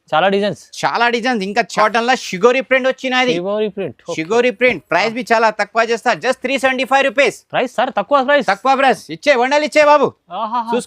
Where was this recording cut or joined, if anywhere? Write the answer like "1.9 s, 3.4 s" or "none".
1.7 s